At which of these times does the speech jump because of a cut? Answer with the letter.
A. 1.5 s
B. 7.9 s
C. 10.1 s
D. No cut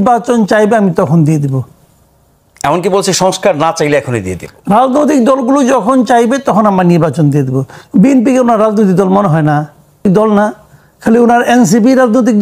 C